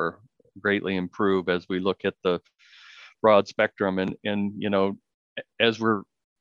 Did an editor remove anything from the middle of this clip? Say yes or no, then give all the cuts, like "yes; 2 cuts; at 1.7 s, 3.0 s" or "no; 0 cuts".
no; 0 cuts